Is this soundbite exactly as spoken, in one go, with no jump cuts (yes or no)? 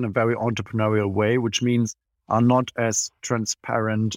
yes